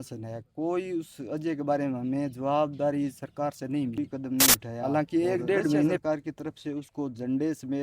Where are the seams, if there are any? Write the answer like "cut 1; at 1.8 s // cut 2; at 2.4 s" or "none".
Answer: cut 1; at 6.0 s